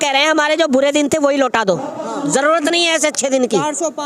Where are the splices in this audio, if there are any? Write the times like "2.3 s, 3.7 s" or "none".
none